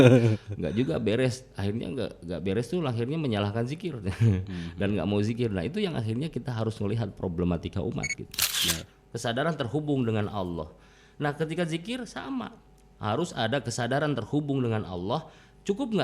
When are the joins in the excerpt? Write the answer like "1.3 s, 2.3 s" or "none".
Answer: 8.6 s